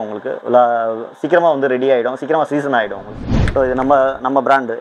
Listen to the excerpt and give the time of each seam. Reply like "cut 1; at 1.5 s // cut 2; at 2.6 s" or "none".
cut 1; at 3.4 s